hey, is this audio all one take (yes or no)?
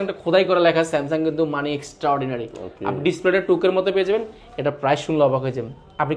yes